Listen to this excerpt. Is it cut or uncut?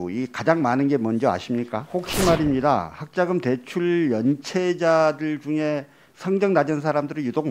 cut